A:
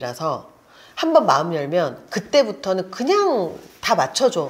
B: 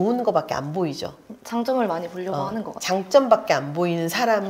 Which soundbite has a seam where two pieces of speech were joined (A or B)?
B